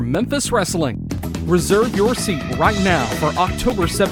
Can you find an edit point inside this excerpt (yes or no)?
no